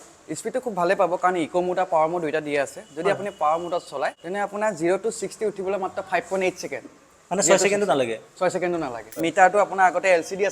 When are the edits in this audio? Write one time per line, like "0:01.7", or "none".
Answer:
0:04.2
0:09.2